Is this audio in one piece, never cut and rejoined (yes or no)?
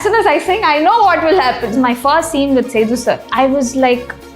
no